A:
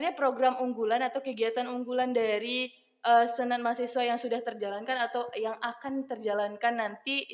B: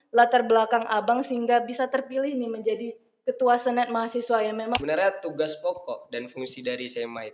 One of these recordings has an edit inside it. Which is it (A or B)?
B